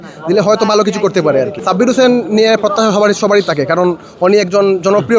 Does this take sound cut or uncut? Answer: cut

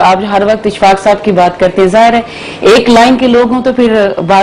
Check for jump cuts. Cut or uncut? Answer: uncut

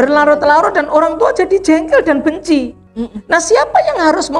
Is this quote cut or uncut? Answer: cut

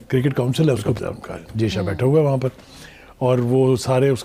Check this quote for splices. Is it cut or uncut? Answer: cut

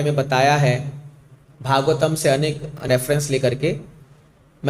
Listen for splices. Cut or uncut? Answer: cut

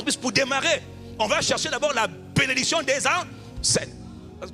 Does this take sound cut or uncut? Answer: uncut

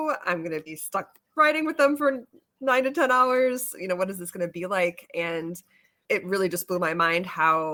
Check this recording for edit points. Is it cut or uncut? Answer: uncut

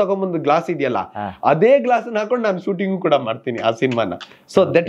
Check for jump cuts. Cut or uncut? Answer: uncut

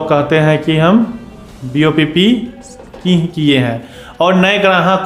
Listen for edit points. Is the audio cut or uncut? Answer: uncut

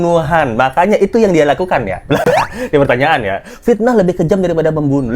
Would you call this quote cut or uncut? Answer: uncut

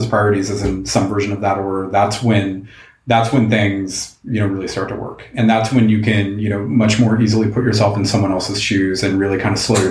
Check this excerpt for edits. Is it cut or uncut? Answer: uncut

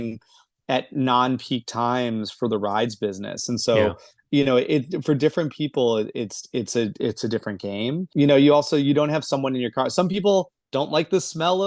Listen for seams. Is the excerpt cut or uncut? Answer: uncut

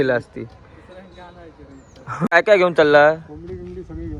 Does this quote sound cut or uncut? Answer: cut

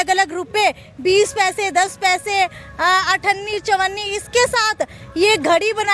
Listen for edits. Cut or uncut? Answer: uncut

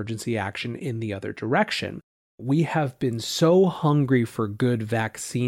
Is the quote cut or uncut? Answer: cut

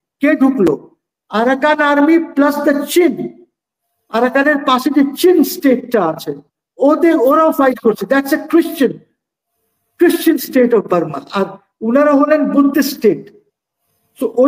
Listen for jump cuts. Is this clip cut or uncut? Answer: uncut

